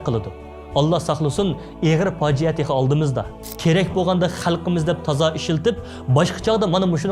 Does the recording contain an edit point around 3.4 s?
yes; 1 cut; at 3.4 s

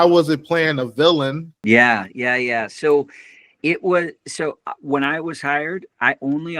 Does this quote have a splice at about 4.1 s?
no; 1 cut; at 1.5 s

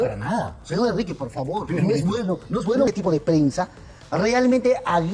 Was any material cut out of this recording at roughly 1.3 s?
no; 1 cut; at 2.9 s

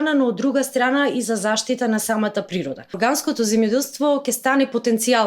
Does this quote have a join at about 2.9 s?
yes; 1 cut; at 2.9 s

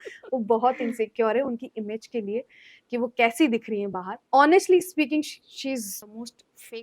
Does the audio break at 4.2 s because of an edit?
yes; 2 cuts; at 4.2 s, 6.0 s

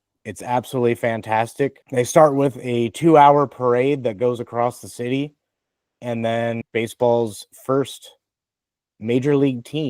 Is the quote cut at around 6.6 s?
yes; 2 cuts; at 1.8 s, 6.6 s

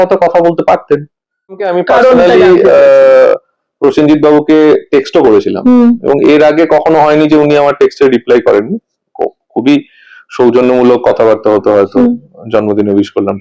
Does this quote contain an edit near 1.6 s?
yes; 1 cut; at 1.6 s

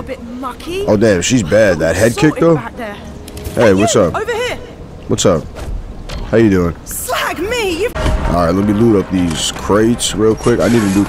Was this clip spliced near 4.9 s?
no; 1 cut; at 7.9 s

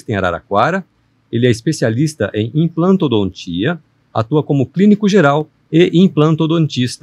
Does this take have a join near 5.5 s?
yes; 1 cut; at 5.5 s

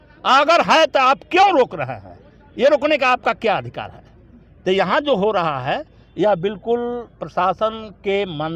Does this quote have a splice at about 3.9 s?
no; 0 cuts

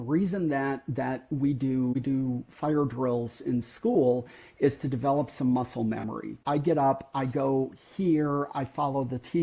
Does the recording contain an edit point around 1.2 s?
no; 1 cut; at 6.4 s

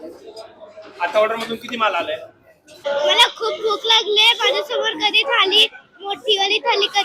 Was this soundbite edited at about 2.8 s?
yes; 1 cut; at 2.8 s

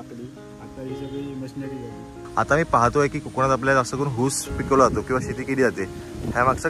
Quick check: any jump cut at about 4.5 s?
yes; 2 cuts; at 2.1 s, 4.5 s

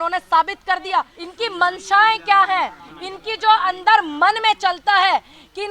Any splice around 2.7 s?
no; 1 cut; at 1.2 s

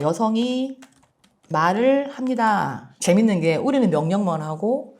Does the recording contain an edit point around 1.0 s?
no; 1 cut; at 2.9 s

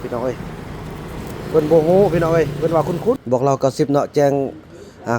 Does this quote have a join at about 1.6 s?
no; 1 cut; at 3.2 s

